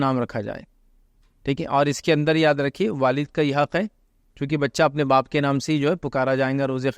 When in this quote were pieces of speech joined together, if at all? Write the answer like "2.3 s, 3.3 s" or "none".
none